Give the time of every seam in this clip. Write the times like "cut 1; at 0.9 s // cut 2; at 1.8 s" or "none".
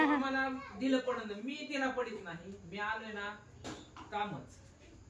none